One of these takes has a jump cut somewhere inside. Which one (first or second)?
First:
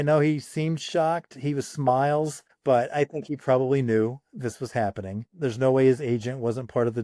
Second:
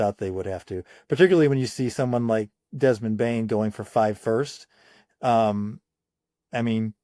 first